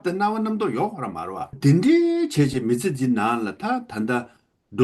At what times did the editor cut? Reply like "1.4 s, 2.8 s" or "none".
1.5 s